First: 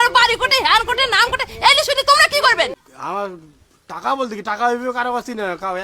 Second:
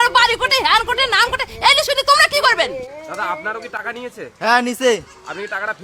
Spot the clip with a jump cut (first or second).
first